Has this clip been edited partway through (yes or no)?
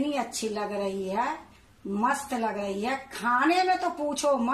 no